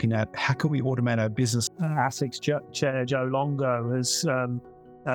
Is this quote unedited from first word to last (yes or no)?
no